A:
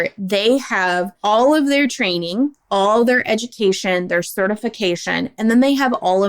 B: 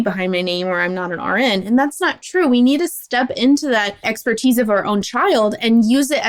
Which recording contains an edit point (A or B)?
A